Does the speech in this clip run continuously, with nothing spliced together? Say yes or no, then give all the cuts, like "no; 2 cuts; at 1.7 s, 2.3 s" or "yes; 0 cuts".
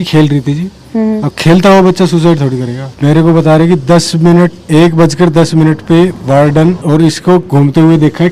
yes; 0 cuts